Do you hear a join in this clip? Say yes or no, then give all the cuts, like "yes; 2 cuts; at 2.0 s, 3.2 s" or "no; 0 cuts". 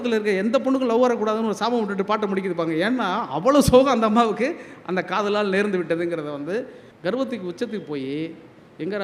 yes; 1 cut; at 6.8 s